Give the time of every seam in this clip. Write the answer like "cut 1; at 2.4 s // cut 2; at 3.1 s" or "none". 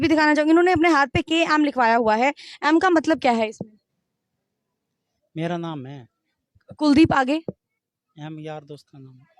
none

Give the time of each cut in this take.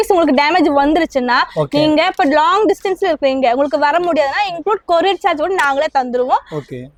none

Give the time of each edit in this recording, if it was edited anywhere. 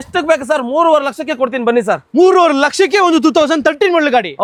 none

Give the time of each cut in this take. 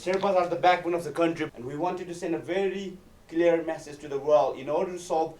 cut 1; at 1.6 s

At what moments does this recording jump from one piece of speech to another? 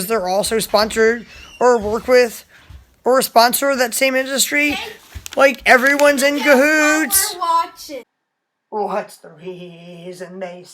cut 1; at 8.1 s

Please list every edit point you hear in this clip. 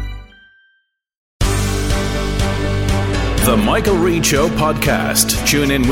cut 1; at 1.2 s

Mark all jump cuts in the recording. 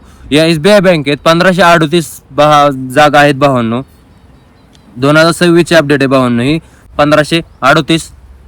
cut 1; at 6.8 s

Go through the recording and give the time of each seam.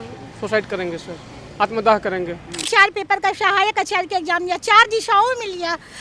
cut 1; at 2.6 s

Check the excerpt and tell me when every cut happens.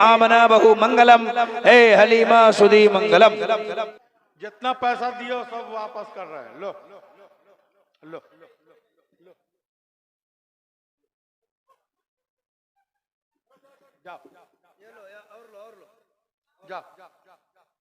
cut 1; at 4.0 s

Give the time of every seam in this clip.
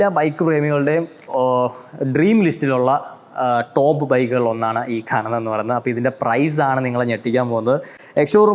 none

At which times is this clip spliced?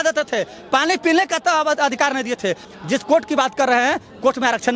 cut 1; at 2.6 s

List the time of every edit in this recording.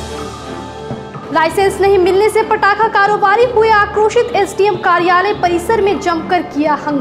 cut 1; at 1.2 s

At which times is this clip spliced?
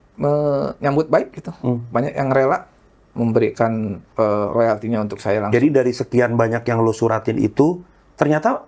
cut 1; at 4.0 s

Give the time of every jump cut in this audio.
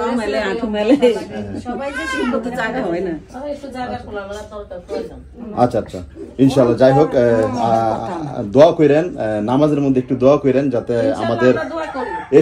none

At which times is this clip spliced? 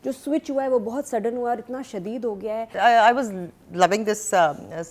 cut 1; at 2.7 s

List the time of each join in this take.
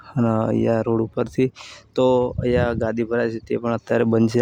none

